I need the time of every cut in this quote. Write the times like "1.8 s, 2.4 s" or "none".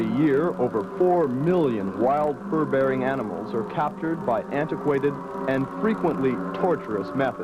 1.9 s